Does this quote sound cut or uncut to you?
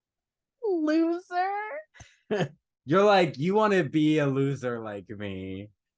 cut